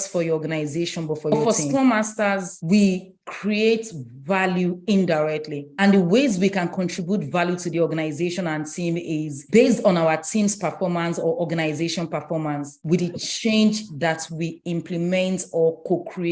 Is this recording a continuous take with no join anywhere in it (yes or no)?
no